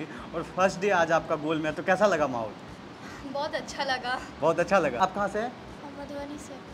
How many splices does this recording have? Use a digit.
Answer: 0